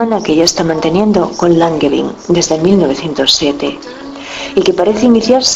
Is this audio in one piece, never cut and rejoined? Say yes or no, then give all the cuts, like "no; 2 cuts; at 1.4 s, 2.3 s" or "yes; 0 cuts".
no; 1 cut; at 1.0 s